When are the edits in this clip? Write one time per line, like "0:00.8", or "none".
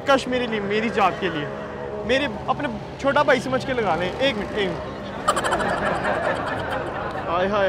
none